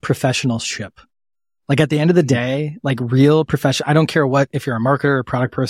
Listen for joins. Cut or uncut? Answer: uncut